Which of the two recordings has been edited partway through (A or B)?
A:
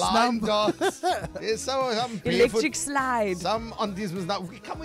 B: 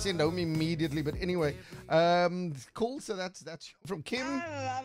B